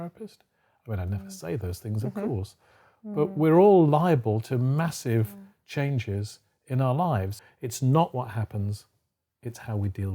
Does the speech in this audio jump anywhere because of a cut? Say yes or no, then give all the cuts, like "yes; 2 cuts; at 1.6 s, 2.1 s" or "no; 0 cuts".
yes; 1 cut; at 7.4 s